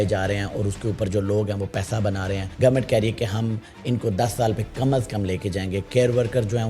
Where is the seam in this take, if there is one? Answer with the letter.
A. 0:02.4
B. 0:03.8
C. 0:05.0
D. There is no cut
A